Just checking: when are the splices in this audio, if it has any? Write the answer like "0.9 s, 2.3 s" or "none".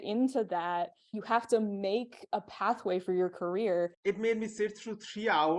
4.0 s